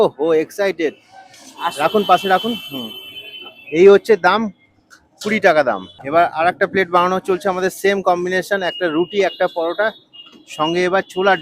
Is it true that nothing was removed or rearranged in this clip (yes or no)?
no